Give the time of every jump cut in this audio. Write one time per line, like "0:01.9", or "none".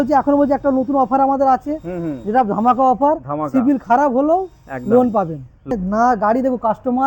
0:05.7